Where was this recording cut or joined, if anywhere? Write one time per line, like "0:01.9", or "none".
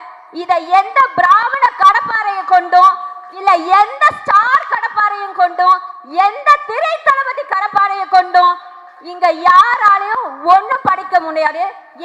none